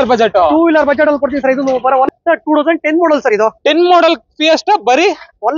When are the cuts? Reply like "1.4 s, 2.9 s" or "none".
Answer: 2.1 s